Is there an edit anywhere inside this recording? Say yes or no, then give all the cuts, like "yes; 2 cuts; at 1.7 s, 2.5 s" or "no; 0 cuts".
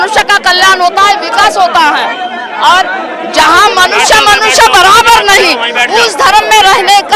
no; 0 cuts